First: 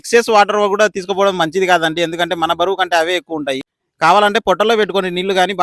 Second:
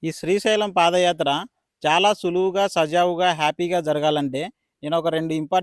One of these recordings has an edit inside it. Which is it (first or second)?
first